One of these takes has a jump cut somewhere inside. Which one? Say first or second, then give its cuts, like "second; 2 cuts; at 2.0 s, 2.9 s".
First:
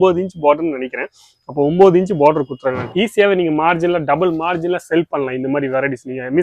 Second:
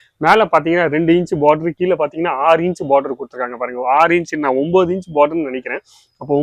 first; 1 cut; at 2.8 s